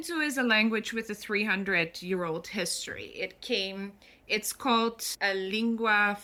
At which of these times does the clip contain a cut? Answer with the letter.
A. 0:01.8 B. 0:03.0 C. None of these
C